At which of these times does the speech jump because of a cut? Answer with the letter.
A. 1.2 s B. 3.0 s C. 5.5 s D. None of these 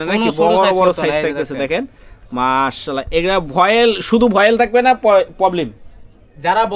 D